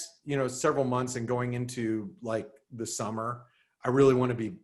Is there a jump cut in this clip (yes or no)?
no